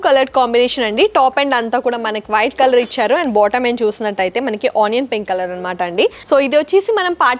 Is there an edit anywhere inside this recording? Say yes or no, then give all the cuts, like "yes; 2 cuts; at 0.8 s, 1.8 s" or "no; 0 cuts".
yes; 1 cut; at 6.2 s